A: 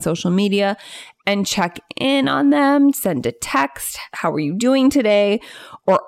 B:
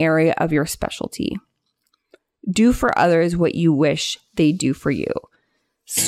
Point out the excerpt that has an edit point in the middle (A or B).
A